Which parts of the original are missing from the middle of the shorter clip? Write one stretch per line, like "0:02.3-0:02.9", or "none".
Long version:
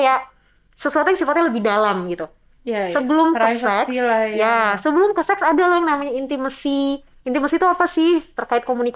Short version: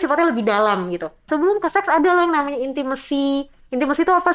0:02.4-0:04.8